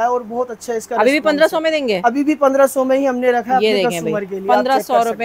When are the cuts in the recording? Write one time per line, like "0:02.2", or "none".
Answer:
none